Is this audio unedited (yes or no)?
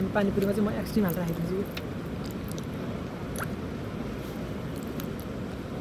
no